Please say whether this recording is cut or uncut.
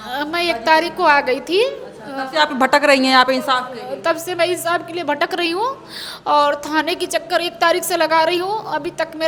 uncut